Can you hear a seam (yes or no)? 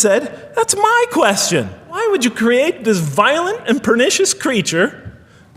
yes